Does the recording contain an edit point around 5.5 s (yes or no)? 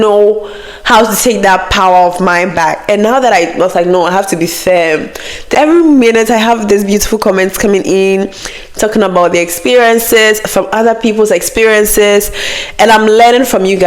yes